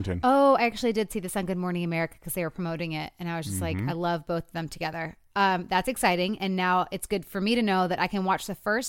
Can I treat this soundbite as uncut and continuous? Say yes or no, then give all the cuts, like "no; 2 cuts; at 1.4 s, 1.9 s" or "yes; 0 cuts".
yes; 0 cuts